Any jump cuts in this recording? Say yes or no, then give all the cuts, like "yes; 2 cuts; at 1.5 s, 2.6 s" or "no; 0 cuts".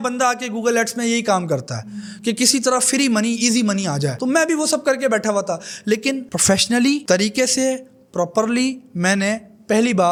no; 0 cuts